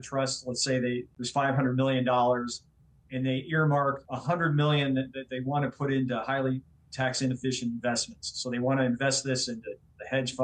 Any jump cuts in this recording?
yes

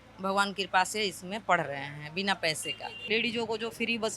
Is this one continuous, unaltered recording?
no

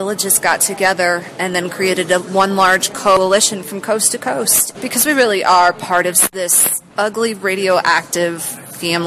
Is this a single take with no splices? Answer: no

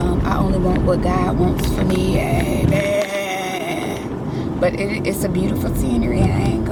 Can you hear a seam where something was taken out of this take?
no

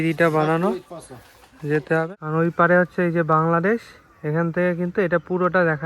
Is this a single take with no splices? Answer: no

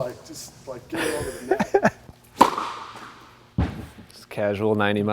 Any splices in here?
yes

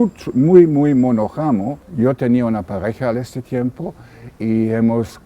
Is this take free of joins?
no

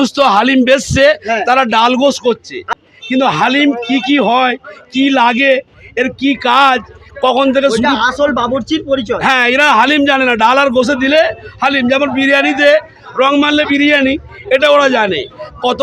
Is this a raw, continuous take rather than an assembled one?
yes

